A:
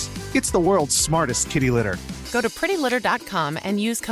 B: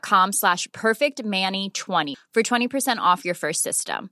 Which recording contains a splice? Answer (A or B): B